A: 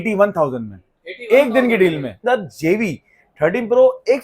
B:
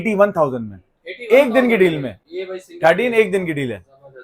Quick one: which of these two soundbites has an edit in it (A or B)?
A